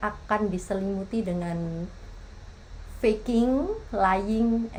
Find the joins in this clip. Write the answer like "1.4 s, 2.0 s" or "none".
none